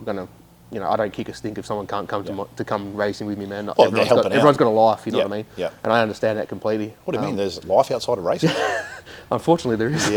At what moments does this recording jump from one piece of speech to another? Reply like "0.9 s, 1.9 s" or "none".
none